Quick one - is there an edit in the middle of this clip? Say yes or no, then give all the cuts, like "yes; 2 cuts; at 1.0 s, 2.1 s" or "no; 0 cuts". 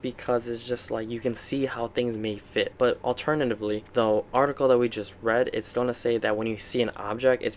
no; 0 cuts